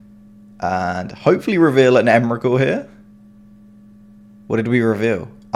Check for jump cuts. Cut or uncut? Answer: uncut